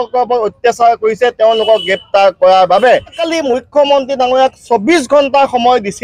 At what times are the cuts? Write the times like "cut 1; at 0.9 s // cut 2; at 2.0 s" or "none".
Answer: cut 1; at 3.2 s